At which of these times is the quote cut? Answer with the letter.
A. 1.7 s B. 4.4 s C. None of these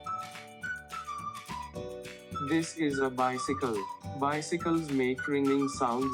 A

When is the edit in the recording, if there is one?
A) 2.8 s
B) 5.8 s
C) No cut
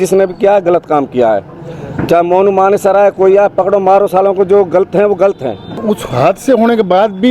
B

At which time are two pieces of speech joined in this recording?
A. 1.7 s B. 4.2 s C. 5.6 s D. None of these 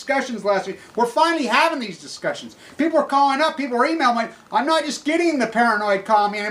B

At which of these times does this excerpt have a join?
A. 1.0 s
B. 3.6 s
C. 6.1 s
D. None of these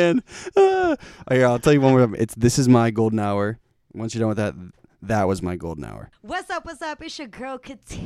C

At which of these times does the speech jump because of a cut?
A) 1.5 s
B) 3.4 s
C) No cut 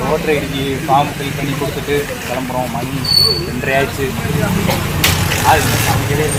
C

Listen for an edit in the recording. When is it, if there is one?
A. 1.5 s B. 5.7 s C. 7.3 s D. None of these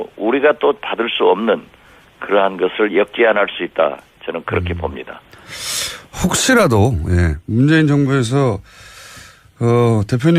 C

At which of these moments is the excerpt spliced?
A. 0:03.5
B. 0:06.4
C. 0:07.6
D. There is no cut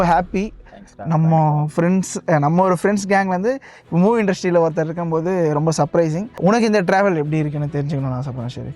B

